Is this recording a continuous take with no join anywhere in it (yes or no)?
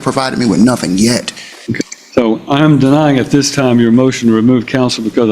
no